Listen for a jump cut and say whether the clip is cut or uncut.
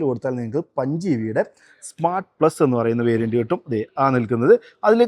uncut